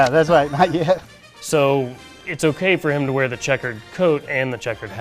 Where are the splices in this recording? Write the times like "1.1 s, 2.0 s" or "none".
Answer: 1.0 s